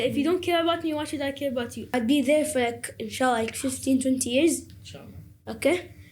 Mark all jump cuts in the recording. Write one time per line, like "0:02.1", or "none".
0:01.8